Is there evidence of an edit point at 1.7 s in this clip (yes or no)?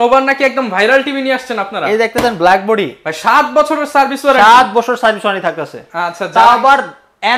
no